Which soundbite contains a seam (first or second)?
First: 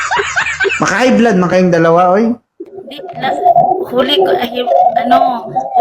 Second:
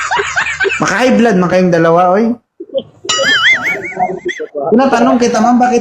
first